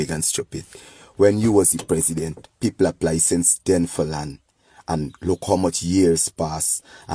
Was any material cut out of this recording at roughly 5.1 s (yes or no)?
yes